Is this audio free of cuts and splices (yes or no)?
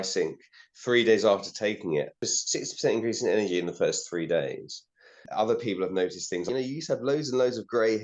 no